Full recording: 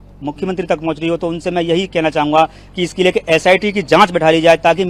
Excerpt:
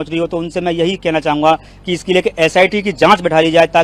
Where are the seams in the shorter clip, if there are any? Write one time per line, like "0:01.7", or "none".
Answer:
none